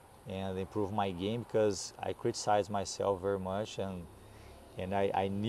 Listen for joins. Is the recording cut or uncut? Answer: uncut